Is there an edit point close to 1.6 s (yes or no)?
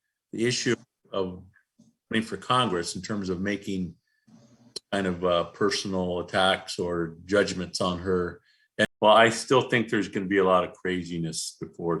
no